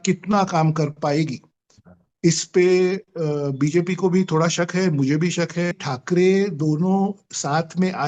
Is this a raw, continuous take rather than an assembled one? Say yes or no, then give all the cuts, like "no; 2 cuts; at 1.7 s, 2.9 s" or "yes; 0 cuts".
no; 1 cut; at 5.8 s